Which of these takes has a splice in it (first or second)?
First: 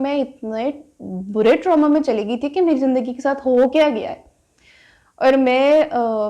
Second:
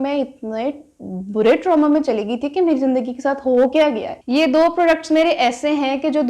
second